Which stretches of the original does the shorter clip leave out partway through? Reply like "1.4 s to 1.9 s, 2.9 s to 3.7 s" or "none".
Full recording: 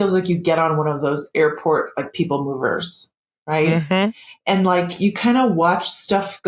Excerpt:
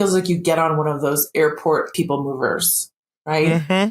1.9 s to 2.1 s